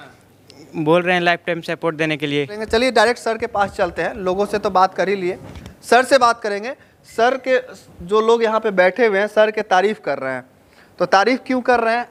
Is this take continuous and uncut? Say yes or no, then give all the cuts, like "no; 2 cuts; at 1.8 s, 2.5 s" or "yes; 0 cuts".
yes; 0 cuts